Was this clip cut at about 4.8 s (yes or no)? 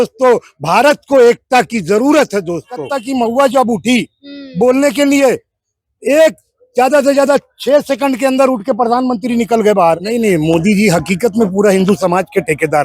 no